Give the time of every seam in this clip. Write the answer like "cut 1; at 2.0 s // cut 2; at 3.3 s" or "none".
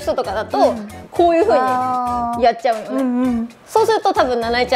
cut 1; at 0.9 s // cut 2; at 3.6 s